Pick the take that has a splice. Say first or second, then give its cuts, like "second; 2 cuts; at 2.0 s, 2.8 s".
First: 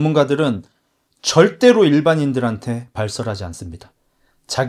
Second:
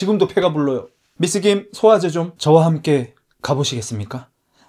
second; 1 cut; at 2.3 s